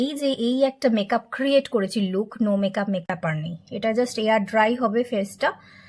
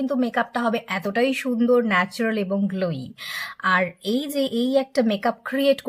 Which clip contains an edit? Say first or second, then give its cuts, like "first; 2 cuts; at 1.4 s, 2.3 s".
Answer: first; 1 cut; at 3.1 s